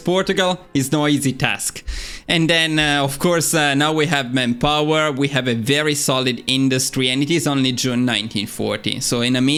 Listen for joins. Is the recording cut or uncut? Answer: uncut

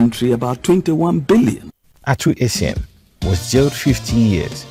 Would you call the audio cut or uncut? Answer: uncut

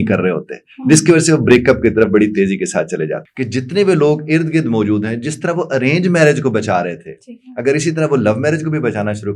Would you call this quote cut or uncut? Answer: cut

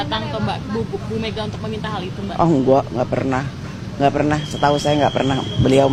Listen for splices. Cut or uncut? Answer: uncut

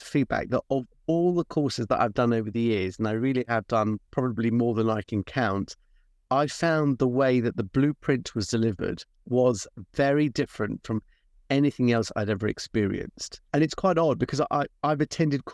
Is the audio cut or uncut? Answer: cut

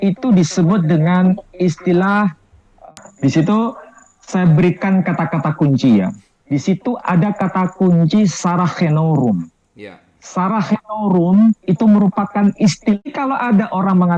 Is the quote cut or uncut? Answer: cut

